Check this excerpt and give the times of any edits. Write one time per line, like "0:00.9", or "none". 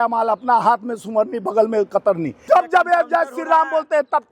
0:02.4